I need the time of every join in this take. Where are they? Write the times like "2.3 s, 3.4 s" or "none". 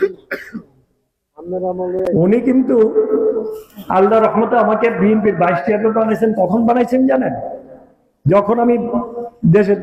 none